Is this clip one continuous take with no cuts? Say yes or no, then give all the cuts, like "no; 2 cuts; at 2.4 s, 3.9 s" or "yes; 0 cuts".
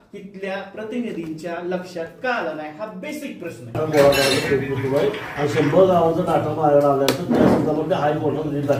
no; 1 cut; at 3.8 s